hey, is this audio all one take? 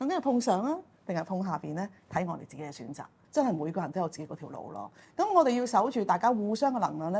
no; 1 cut; at 3.2 s

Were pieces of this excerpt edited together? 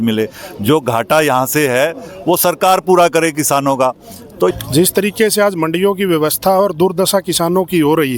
yes; 1 cut; at 4.5 s

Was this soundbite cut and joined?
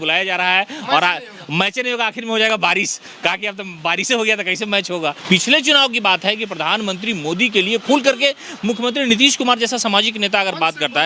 yes; 1 cut; at 5.2 s

